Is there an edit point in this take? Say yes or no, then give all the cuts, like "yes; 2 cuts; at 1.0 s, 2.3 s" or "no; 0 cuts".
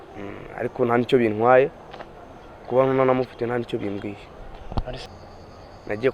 yes; 1 cut; at 5.0 s